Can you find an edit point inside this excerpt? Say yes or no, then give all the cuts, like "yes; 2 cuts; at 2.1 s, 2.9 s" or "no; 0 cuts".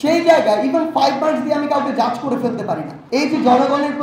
yes; 1 cut; at 2.9 s